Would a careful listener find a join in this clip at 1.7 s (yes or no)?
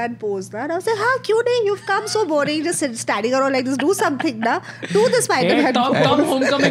no